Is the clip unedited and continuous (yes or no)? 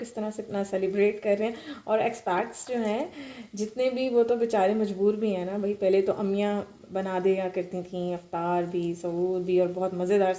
yes